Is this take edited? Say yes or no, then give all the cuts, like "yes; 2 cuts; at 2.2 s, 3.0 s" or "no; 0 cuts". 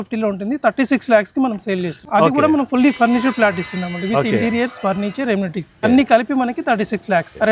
yes; 2 cuts; at 2.0 s, 5.8 s